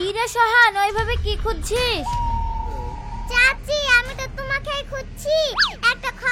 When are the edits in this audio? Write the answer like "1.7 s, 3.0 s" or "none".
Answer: none